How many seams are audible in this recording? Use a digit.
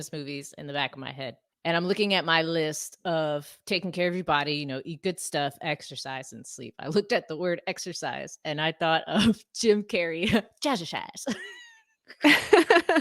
1